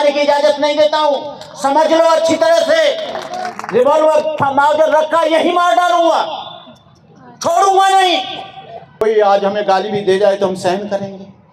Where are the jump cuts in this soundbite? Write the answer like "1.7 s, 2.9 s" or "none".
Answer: 8.9 s